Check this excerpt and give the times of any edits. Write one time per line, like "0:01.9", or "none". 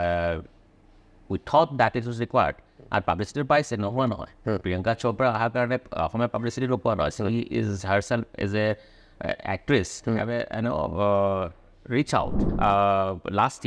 0:12.4